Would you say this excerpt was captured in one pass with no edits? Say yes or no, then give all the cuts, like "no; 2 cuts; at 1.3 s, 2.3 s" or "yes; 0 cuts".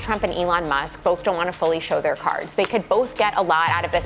yes; 0 cuts